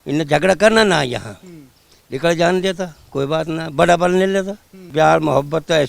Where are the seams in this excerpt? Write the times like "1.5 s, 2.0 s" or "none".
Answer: 4.9 s